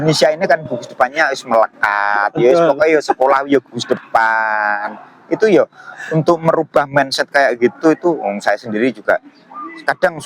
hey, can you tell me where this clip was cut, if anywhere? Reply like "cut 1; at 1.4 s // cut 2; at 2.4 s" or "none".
none